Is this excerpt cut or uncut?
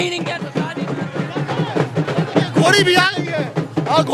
uncut